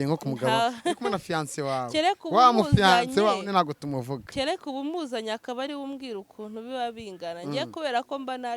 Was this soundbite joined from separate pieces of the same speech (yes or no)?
no